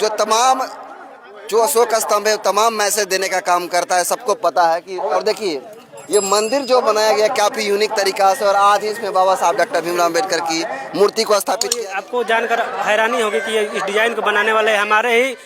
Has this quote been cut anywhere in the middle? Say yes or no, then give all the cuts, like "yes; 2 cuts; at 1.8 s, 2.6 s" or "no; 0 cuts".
yes; 2 cuts; at 5.2 s, 11.7 s